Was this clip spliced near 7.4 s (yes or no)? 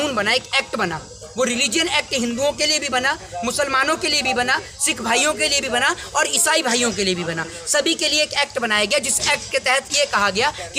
no